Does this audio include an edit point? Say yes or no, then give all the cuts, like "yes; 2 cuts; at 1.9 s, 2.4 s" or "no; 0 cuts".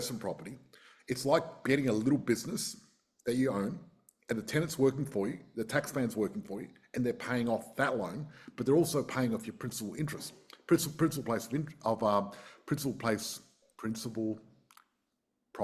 no; 0 cuts